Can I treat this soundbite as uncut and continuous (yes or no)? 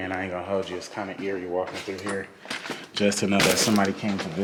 yes